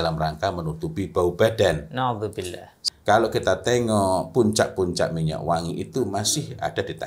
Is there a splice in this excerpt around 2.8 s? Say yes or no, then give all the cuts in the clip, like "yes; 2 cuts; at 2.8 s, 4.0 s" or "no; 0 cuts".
yes; 1 cut; at 2.8 s